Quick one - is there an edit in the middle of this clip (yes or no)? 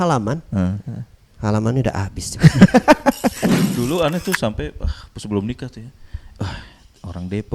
yes